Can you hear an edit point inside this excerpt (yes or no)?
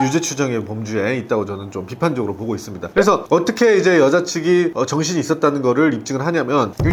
no